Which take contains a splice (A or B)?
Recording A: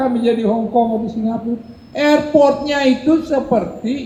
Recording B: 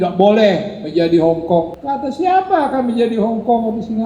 B